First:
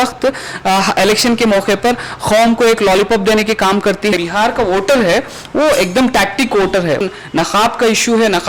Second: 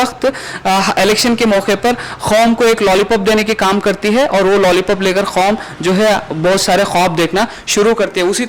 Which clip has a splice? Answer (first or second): first